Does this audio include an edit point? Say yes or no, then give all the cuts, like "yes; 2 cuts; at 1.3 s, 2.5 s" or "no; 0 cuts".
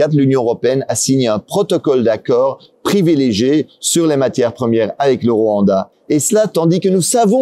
yes; 2 cuts; at 2.7 s, 5.9 s